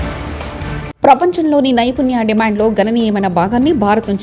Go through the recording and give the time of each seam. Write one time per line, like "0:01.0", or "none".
0:00.9